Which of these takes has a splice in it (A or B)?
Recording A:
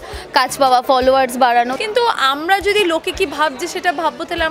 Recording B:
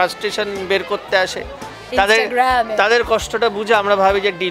A